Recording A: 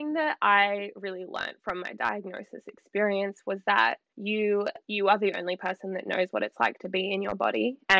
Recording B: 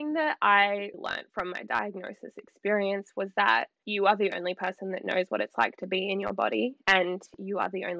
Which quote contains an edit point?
B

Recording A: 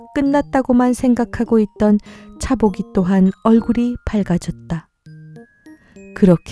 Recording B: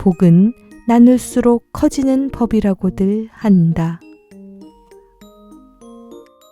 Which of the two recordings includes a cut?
B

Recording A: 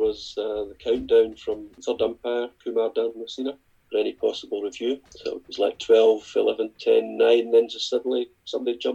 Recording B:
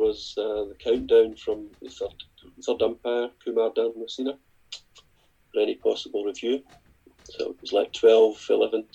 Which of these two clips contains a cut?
A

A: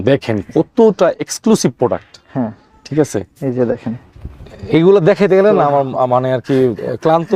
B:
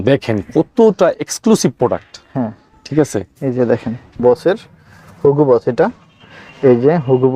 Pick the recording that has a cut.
B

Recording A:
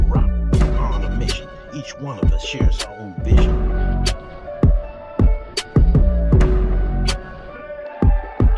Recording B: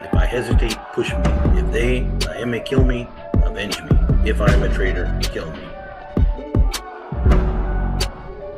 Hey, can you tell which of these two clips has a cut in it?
B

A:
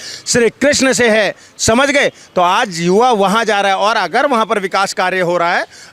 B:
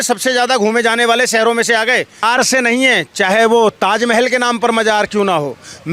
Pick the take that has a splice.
B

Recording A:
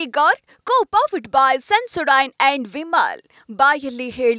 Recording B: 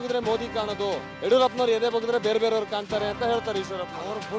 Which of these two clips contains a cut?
B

